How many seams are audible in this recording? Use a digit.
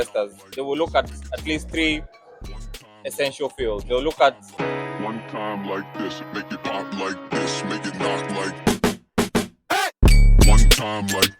1